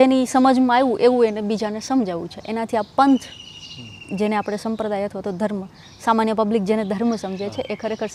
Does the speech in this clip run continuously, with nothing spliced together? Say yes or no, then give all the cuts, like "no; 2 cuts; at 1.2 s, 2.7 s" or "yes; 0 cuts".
yes; 0 cuts